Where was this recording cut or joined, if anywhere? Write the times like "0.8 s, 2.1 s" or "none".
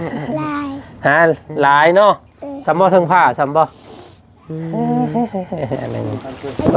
5.8 s